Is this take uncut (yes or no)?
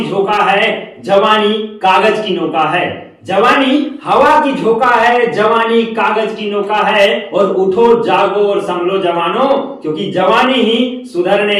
yes